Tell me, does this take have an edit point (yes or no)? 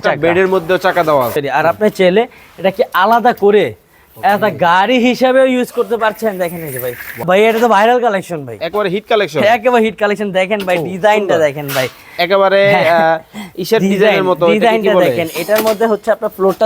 yes